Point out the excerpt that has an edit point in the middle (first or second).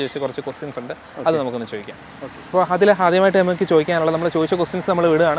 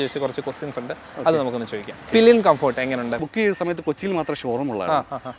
second